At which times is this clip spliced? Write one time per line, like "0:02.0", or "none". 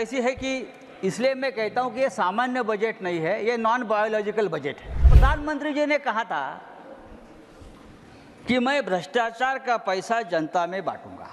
0:05.1